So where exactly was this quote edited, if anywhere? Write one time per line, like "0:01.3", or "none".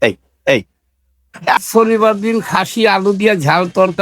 0:01.6